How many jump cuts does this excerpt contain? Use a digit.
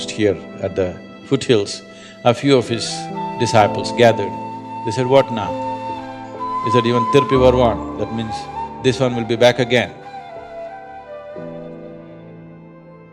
0